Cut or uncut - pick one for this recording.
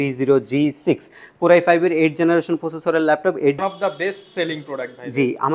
cut